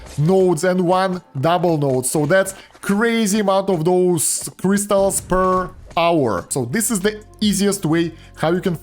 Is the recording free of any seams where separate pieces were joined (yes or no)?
no